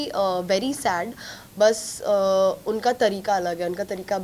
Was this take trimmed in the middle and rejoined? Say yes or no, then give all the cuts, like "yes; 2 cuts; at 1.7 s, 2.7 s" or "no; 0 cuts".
no; 0 cuts